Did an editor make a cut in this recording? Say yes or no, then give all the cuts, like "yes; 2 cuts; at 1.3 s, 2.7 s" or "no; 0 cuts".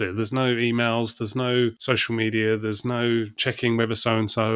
yes; 2 cuts; at 1.8 s, 3.4 s